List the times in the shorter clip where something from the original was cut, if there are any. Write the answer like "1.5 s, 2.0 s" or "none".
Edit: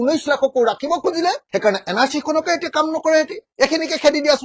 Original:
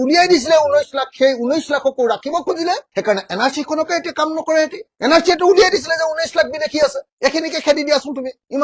3.4 s